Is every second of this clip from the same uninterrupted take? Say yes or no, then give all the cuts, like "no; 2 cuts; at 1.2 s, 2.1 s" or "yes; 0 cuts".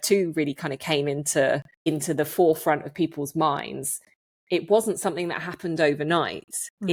yes; 0 cuts